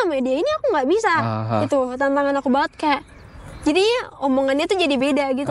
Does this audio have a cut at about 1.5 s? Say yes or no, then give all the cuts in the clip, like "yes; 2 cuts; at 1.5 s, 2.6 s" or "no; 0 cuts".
no; 0 cuts